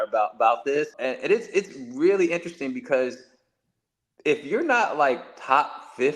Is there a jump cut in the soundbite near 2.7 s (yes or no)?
no